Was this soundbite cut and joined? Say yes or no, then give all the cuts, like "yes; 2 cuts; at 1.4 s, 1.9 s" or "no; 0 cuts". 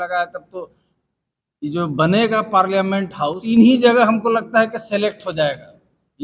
yes; 1 cut; at 3.3 s